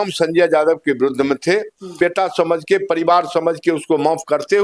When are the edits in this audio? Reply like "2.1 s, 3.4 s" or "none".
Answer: 2.0 s

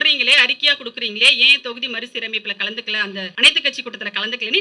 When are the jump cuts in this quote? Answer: 3.3 s

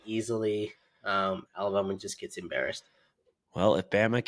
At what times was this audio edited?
none

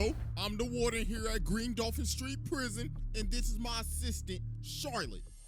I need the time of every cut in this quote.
none

